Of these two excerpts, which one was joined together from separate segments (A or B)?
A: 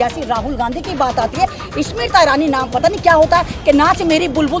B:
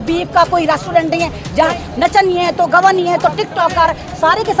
B